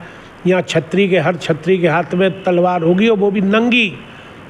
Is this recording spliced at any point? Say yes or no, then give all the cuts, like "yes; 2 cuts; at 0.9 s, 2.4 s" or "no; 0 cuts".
no; 0 cuts